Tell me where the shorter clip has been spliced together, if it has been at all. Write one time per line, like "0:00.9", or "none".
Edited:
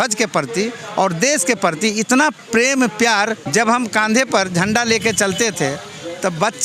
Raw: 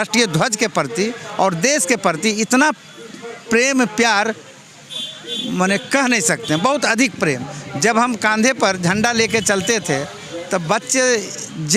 0:02.4
0:03.4